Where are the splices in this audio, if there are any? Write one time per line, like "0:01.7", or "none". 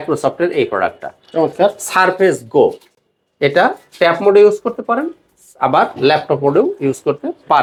none